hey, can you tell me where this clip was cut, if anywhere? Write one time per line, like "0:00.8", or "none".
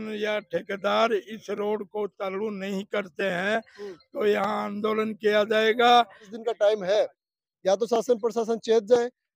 0:06.3